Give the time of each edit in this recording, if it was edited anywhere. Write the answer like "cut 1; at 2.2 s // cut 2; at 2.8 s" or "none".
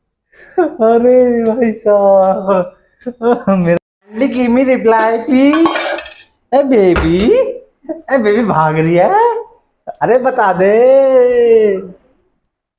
cut 1; at 3.8 s